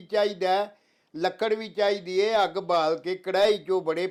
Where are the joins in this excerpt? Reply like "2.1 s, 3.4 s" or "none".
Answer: none